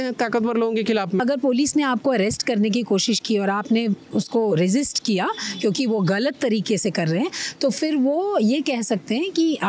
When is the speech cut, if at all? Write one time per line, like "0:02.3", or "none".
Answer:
0:01.2